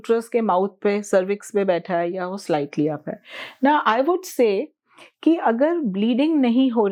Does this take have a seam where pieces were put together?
no; 0 cuts

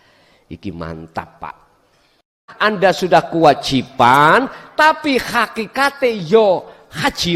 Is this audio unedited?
no; 1 cut; at 2.5 s

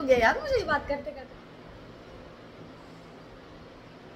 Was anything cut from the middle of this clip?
yes; 1 cut; at 1.1 s

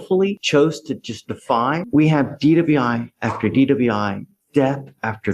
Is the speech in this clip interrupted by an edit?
yes; 1 cut; at 1.8 s

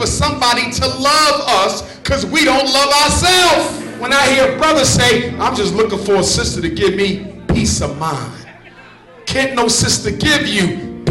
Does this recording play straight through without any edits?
no; 1 cut; at 4.0 s

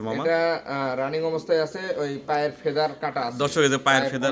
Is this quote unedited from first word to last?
yes; 0 cuts

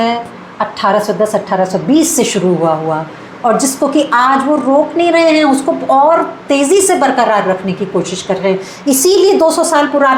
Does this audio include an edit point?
no; 0 cuts

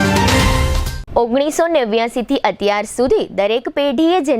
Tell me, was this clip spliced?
no; 0 cuts

